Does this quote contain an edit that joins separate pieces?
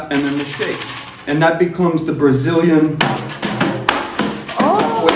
no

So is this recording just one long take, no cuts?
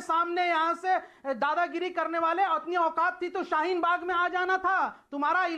yes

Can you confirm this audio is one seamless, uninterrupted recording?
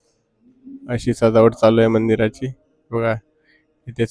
yes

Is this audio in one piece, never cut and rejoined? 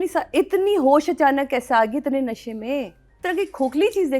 no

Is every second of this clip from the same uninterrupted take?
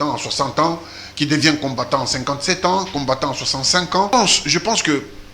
no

